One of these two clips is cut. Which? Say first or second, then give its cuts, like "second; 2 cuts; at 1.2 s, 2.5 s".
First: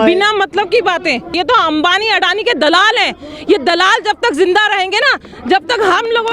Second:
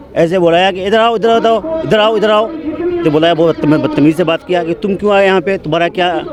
first; 1 cut; at 1.3 s